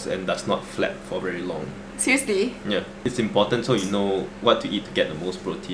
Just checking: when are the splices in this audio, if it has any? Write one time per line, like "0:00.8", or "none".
0:02.9
0:04.3